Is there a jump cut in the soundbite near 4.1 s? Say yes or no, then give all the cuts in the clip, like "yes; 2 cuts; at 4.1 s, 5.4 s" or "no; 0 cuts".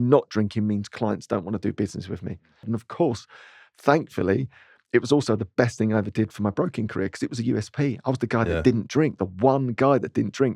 no; 1 cut; at 2.7 s